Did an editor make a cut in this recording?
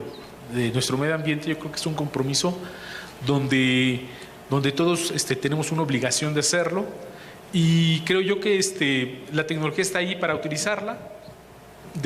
yes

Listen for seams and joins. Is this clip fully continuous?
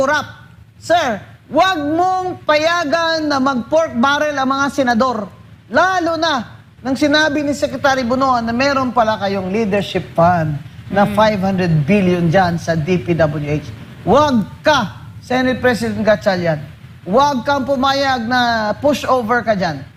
yes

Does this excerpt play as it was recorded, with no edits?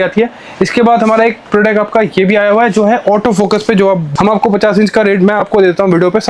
no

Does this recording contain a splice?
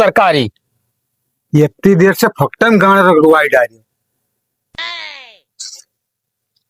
no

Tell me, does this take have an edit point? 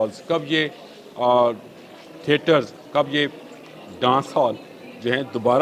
no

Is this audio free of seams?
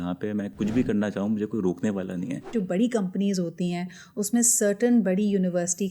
no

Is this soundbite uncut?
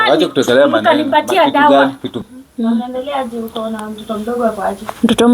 no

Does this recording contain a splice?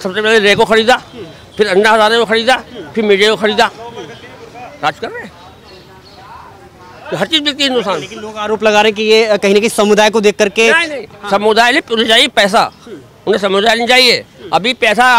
no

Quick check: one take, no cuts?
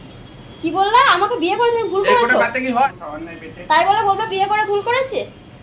no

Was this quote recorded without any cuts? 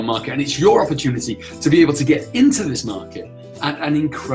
yes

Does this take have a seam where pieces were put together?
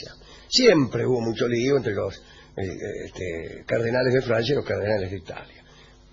yes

